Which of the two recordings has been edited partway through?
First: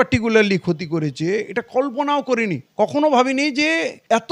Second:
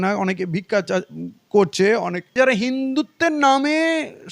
second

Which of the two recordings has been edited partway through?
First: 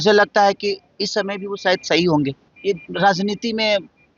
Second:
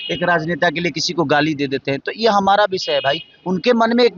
first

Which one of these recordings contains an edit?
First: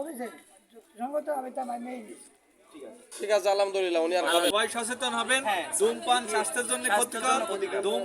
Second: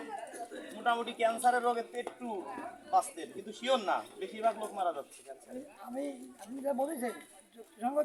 first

